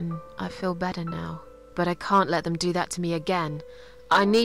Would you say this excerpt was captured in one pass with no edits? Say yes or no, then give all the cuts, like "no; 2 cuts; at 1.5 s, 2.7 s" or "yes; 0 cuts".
yes; 0 cuts